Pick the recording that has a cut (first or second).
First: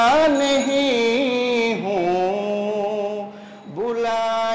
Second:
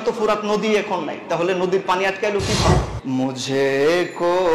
second